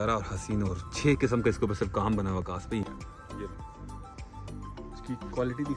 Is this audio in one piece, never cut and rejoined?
no; 1 cut; at 2.8 s

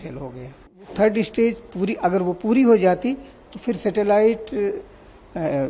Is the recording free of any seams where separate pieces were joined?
no; 1 cut; at 0.9 s

